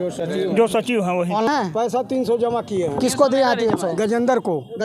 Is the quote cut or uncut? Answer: cut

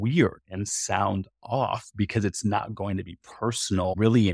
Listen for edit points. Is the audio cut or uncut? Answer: uncut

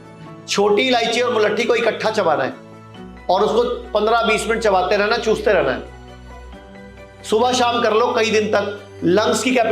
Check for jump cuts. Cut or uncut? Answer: uncut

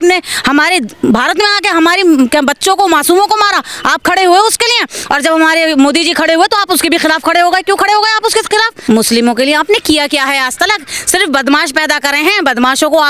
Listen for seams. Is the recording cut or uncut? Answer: cut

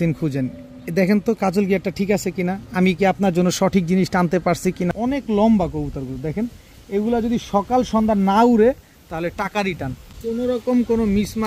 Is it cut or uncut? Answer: cut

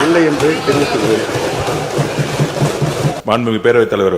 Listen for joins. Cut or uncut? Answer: cut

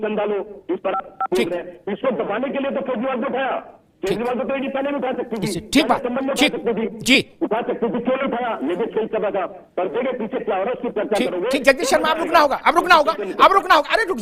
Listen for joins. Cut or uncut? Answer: uncut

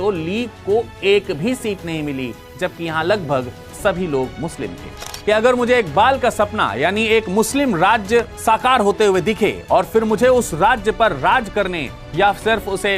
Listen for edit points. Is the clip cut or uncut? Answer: cut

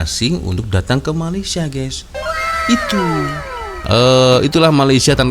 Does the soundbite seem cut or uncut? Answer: cut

